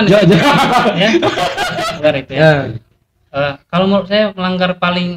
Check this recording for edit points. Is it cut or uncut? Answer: cut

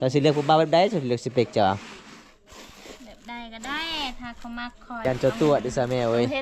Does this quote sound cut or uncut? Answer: cut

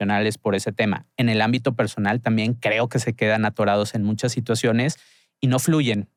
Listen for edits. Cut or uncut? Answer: uncut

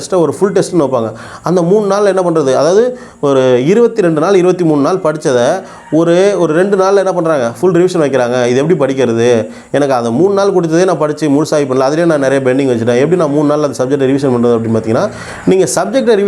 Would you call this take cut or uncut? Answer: uncut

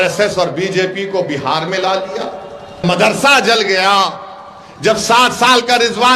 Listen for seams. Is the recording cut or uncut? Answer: cut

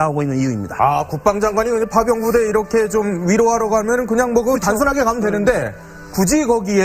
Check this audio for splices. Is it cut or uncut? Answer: cut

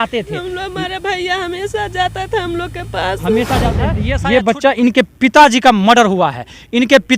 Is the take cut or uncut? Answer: cut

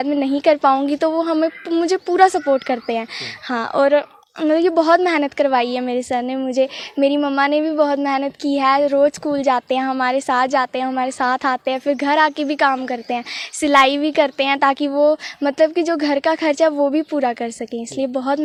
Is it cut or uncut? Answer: uncut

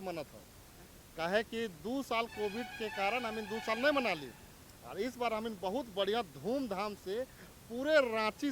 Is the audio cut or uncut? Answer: uncut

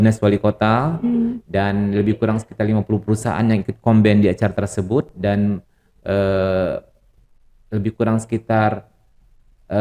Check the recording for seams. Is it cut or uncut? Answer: uncut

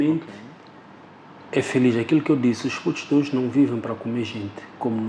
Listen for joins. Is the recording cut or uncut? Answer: uncut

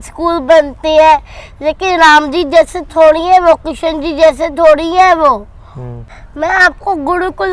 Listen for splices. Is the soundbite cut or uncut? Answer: uncut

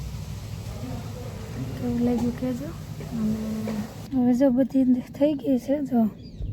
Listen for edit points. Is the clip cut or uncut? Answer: cut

